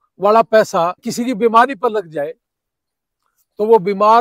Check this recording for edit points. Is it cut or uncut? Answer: cut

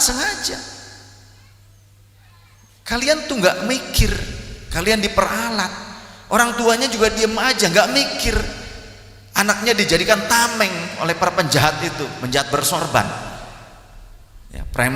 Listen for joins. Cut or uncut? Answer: uncut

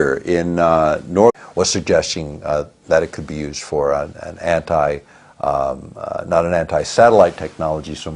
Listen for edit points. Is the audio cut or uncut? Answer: uncut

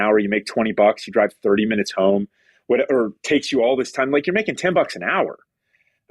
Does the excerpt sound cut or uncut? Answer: uncut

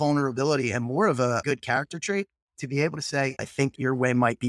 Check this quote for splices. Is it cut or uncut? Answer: cut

